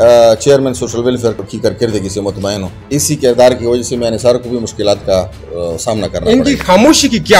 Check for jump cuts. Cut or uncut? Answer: cut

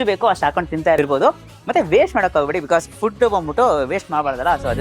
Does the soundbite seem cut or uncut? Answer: uncut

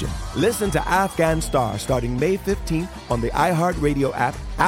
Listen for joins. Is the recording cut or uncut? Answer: uncut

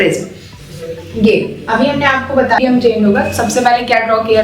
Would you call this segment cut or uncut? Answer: cut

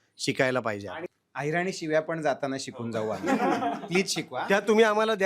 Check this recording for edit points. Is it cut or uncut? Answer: cut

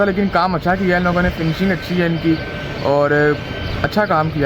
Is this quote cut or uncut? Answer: uncut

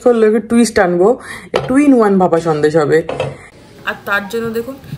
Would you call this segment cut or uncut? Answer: cut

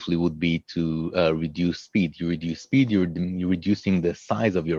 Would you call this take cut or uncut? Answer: uncut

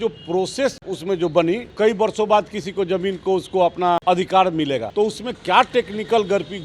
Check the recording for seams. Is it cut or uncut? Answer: cut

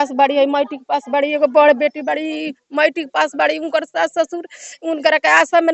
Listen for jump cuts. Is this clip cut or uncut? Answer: uncut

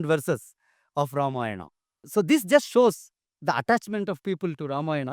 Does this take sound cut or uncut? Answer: cut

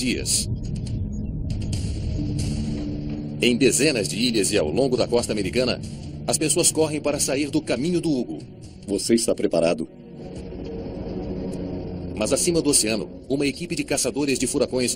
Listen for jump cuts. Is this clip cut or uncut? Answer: uncut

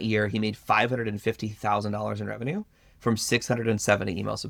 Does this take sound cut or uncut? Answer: uncut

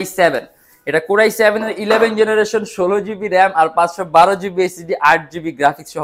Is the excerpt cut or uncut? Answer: uncut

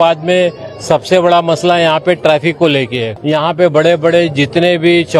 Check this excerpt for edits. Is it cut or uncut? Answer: cut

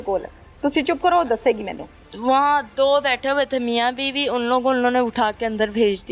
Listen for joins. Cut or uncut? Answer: uncut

